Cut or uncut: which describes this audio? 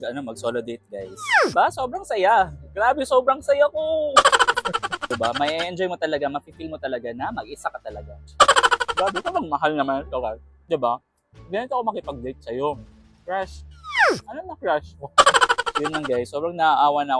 uncut